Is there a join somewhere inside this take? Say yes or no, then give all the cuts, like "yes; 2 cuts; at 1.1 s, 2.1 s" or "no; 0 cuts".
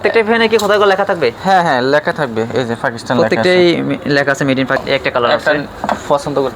yes; 1 cut; at 4.8 s